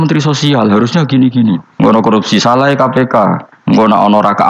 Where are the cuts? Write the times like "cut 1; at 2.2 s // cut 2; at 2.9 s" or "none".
cut 1; at 1.9 s // cut 2; at 3.5 s